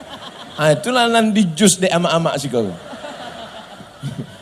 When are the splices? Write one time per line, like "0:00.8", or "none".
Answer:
none